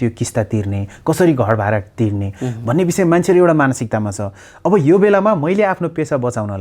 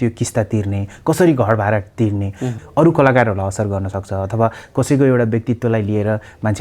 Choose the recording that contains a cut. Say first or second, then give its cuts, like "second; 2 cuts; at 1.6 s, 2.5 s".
second; 1 cut; at 2.6 s